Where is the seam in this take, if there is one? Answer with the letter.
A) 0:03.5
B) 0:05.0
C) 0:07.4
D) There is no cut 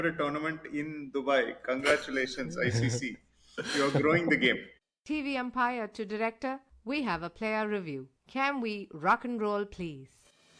B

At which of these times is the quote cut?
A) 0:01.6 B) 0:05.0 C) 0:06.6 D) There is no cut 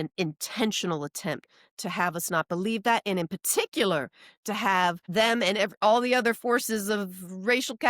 B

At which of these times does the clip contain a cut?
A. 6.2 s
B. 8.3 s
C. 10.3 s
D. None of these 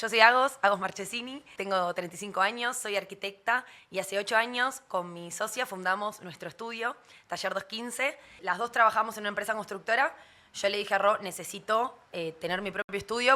B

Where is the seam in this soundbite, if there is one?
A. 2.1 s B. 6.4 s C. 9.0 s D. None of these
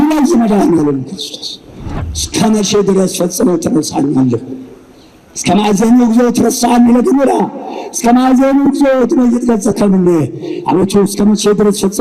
A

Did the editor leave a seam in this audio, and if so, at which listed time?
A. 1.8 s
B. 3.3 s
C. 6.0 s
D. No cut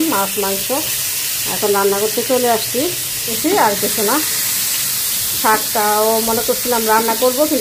B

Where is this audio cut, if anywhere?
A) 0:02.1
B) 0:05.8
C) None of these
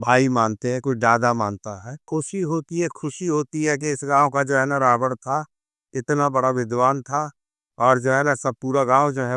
A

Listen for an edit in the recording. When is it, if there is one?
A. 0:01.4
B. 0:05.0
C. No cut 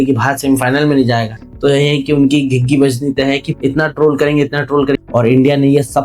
B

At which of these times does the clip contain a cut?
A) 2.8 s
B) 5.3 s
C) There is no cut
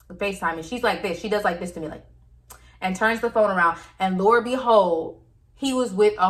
C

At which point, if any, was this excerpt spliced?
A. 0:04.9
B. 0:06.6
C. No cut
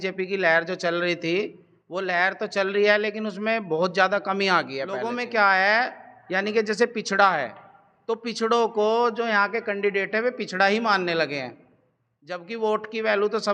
A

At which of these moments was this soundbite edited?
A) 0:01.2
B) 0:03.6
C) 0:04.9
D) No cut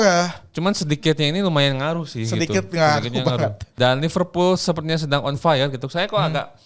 B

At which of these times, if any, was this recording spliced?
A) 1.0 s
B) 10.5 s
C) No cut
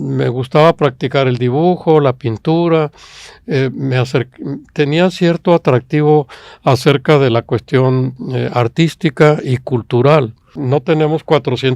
B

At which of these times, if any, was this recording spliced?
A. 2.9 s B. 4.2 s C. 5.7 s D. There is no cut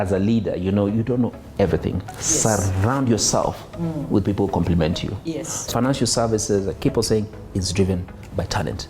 C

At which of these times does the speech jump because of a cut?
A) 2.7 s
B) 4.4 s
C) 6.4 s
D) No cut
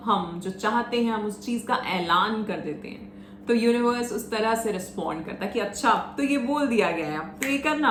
D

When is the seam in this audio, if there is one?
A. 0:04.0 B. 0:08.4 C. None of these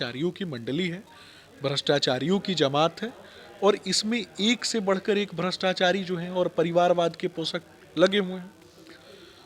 C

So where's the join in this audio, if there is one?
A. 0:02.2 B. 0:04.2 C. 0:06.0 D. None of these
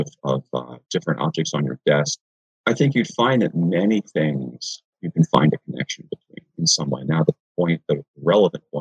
A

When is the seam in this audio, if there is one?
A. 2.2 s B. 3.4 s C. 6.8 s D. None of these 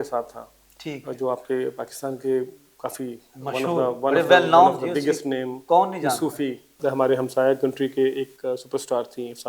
C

